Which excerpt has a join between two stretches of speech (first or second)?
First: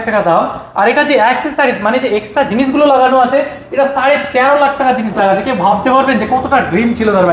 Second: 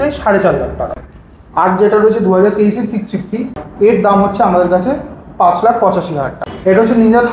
second